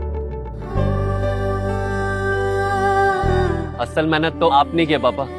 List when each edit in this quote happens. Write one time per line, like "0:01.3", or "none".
0:03.4